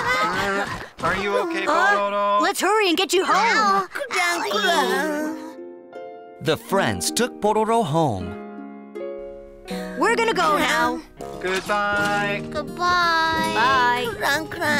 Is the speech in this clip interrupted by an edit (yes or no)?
yes